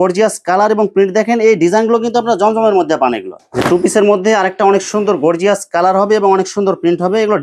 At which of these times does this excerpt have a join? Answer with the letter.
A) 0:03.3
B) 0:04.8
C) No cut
A